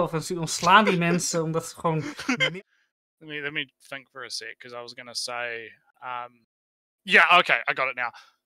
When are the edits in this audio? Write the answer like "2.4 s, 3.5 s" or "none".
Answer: 2.4 s